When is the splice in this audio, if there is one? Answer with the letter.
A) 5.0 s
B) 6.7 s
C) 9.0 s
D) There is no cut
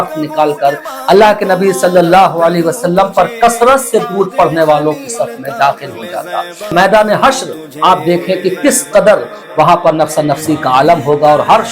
B